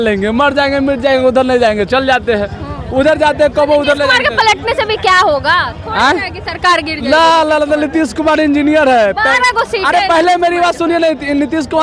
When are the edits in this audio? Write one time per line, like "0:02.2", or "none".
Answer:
none